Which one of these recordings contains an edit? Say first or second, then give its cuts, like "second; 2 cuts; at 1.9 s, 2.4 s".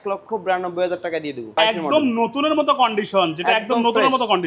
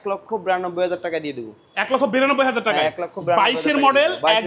first; 1 cut; at 1.5 s